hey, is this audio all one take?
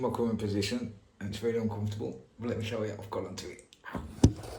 yes; 0 cuts

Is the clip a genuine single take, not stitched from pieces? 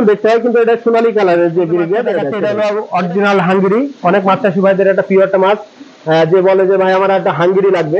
no; 1 cut; at 2.3 s

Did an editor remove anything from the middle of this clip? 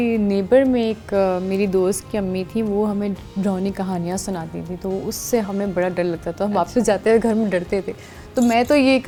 no; 0 cuts

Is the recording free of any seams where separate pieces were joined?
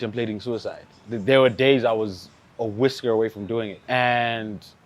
yes; 0 cuts

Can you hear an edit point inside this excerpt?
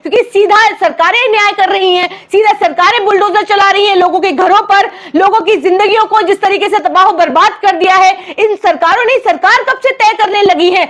no; 0 cuts

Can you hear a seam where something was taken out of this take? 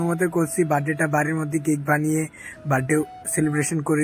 no; 0 cuts

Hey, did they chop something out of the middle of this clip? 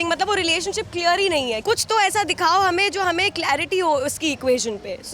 yes; 1 cut; at 1.6 s

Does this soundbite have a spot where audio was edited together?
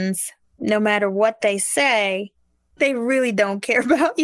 yes; 1 cut; at 2.6 s

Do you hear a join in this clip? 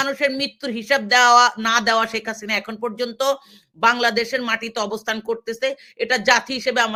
no; 0 cuts

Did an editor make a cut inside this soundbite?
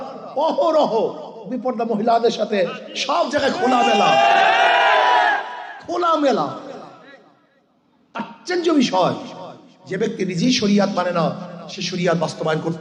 no; 0 cuts

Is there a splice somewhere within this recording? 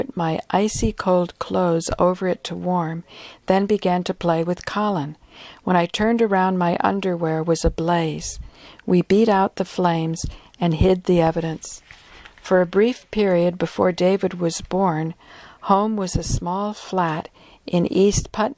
yes; 1 cut; at 8.9 s

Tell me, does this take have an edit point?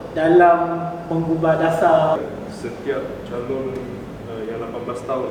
yes; 1 cut; at 2.2 s

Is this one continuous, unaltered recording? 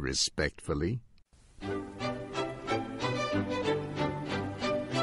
no; 1 cut; at 2.7 s

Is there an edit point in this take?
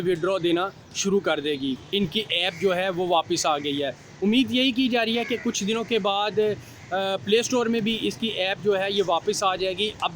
yes; 1 cut; at 1.8 s

